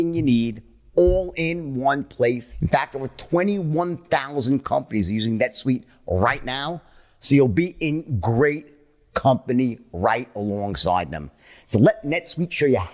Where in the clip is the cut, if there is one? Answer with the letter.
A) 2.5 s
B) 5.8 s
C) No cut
A